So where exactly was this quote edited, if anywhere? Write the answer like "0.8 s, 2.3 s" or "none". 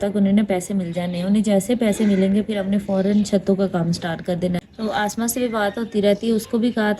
4.7 s